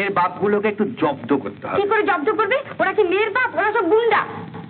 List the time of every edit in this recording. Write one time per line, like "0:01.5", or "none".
none

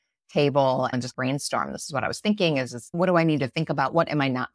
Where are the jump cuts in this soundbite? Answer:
0:00.9
0:02.8

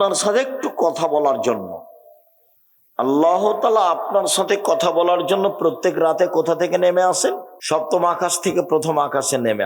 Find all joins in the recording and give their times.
0:07.5

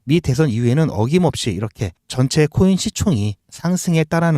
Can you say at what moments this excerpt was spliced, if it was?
none

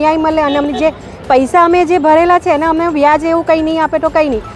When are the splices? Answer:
none

